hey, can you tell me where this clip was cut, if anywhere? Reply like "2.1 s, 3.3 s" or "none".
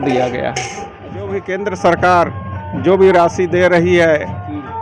1.4 s